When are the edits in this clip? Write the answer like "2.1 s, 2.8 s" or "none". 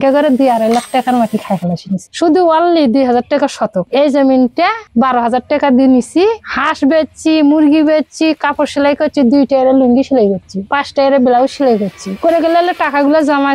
2.1 s